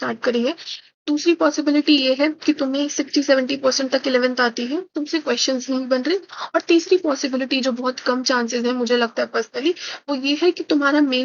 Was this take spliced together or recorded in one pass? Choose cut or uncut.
uncut